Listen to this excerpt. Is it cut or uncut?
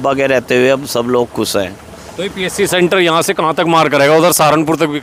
uncut